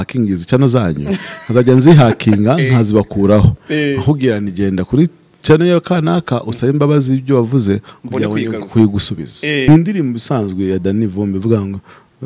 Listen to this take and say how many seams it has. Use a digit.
1